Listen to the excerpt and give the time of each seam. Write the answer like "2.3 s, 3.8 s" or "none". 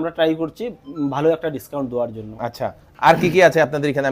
none